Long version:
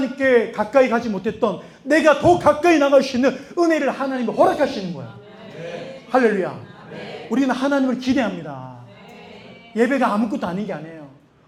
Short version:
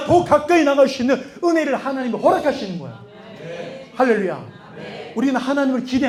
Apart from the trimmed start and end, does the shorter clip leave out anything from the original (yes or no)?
no